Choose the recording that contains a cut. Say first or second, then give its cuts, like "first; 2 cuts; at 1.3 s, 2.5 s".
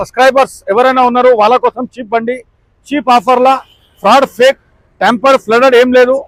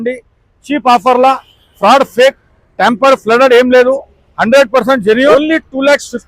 second; 1 cut; at 5.3 s